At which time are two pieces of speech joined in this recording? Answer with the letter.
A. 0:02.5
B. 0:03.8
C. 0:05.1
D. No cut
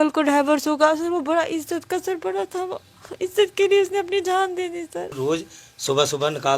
C